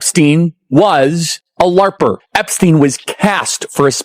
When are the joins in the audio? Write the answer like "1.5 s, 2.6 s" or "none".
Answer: 2.2 s